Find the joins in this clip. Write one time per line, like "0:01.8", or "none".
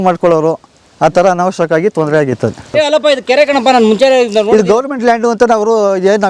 0:02.7